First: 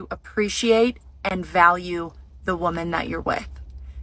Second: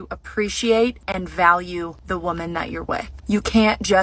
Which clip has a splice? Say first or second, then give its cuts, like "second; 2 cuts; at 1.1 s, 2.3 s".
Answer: second; 3 cuts; at 1.0 s, 2.0 s, 3.1 s